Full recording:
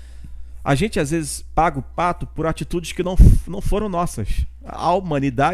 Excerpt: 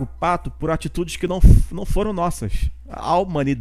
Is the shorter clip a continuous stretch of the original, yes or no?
yes